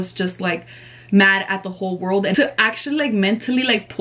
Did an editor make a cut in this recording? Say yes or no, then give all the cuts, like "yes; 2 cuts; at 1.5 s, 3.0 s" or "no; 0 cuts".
yes; 1 cut; at 2.4 s